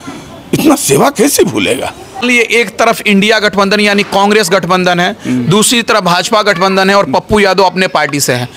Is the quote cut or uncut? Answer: uncut